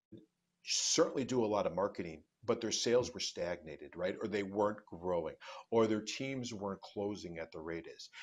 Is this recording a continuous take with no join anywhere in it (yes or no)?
yes